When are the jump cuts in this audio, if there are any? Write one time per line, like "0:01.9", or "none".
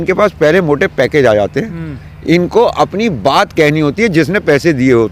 none